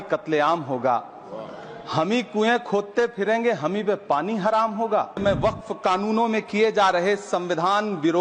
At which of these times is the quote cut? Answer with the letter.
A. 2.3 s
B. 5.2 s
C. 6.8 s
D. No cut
B